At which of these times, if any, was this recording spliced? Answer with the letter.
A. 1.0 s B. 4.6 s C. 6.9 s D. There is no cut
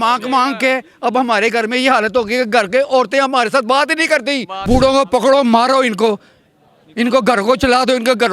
B